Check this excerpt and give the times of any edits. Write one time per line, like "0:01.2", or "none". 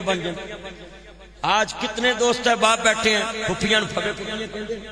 none